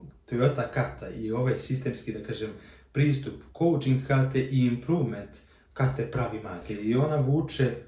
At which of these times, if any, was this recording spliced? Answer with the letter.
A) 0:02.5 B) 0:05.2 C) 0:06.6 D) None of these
C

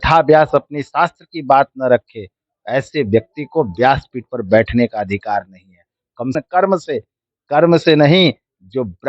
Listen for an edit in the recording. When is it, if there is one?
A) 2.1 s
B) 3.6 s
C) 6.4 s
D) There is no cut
C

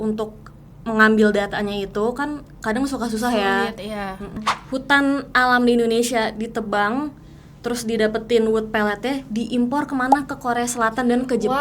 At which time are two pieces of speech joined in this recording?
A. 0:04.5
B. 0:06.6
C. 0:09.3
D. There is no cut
A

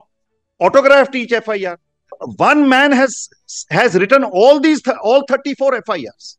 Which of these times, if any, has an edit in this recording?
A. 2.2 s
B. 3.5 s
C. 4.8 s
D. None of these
A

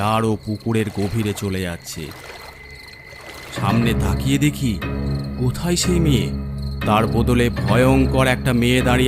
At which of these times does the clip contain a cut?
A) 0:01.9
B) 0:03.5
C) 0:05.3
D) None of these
B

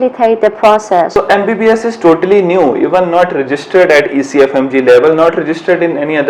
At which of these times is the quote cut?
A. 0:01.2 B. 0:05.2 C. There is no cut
A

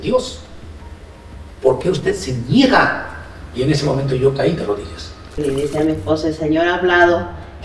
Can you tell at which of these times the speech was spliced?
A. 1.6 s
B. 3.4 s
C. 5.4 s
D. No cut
C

